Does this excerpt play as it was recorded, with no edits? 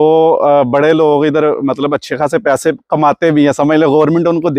yes; 0 cuts

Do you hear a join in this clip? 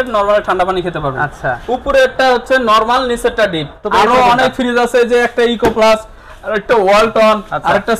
yes; 1 cut; at 3.8 s

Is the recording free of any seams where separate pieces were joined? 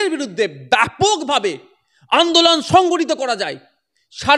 yes; 0 cuts

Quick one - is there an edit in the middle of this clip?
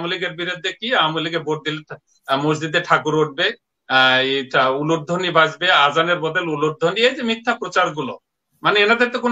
no; 0 cuts

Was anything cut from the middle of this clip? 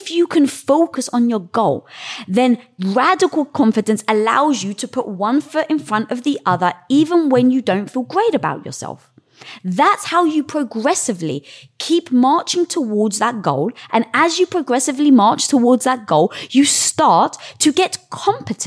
yes; 1 cut; at 0.9 s

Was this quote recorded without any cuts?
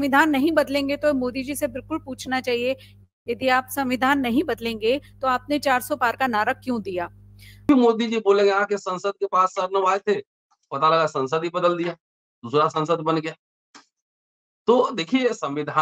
no; 1 cut; at 7.7 s

